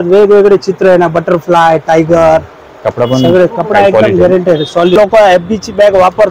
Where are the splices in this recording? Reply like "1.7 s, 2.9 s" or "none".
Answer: 5.0 s

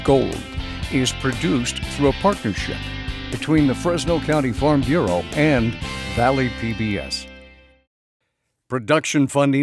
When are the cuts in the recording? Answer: 7.1 s

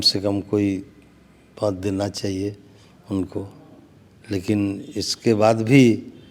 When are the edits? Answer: none

